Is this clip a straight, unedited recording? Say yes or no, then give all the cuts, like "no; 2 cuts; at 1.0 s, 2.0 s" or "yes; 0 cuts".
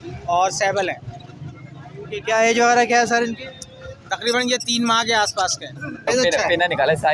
no; 1 cut; at 6.1 s